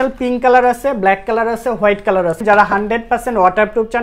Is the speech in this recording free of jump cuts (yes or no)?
no